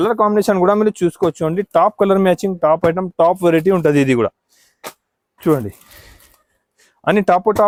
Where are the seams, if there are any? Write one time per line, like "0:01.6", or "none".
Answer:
none

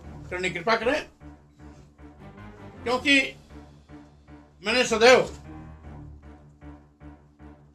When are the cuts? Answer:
none

